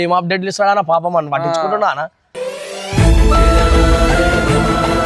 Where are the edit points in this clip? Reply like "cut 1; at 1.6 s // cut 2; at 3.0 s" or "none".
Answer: none